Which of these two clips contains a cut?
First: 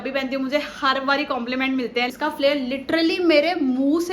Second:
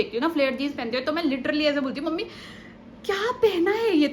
first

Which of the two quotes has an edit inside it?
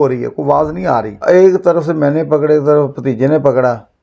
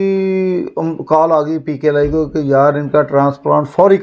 first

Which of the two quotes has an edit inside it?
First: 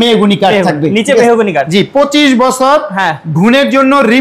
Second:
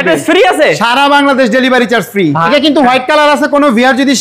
second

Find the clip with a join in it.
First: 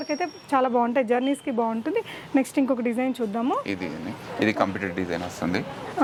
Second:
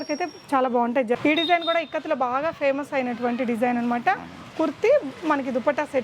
second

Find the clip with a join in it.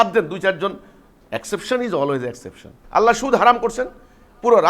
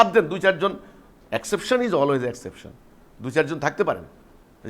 first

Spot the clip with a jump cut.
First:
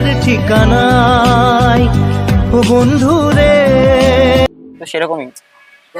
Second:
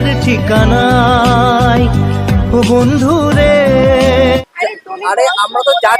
second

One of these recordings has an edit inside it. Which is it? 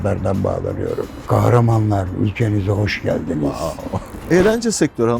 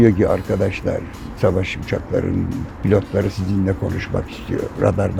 first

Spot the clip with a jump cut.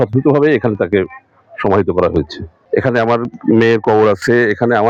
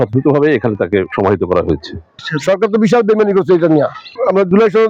second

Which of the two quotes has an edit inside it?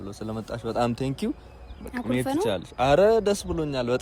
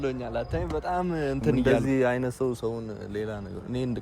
second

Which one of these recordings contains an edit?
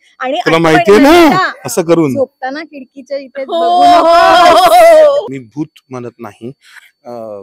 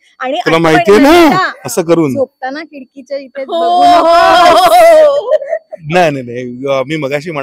first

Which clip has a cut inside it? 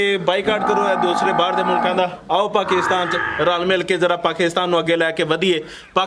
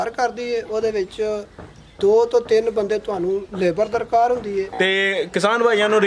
second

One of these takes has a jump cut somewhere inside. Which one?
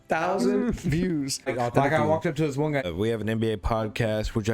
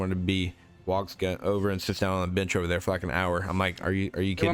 first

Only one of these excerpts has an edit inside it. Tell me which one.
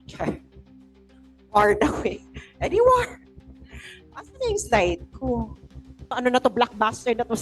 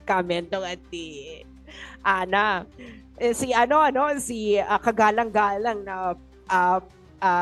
first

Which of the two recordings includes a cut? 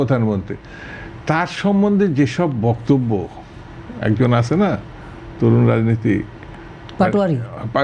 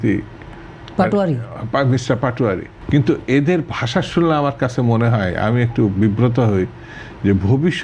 second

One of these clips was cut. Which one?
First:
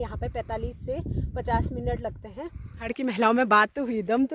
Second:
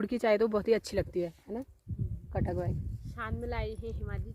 first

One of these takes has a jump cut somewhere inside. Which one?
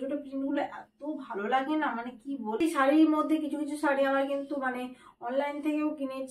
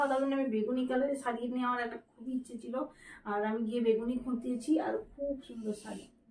first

